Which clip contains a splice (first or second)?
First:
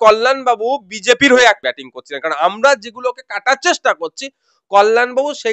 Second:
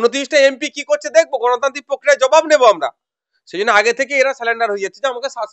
first